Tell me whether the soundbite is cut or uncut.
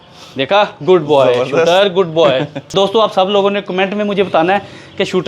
cut